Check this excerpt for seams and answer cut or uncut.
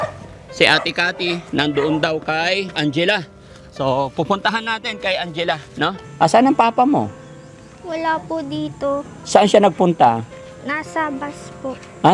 cut